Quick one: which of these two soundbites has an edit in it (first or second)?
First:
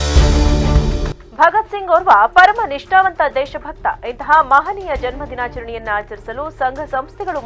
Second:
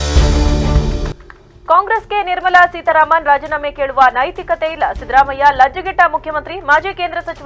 second